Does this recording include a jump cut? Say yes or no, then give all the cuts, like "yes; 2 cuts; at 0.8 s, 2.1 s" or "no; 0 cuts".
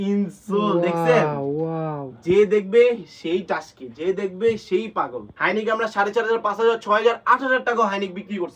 yes; 1 cut; at 5.2 s